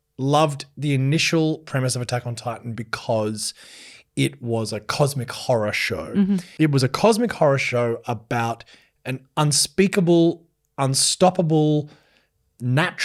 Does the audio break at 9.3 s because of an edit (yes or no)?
no